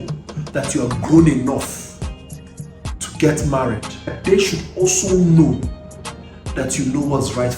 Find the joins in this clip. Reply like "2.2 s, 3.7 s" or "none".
4.2 s